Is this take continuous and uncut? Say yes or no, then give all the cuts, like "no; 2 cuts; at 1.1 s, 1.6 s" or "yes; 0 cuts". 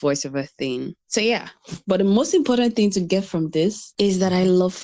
no; 1 cut; at 3.8 s